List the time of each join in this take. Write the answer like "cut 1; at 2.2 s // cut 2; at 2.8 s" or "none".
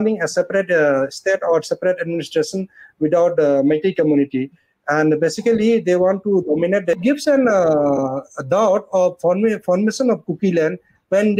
cut 1; at 7.0 s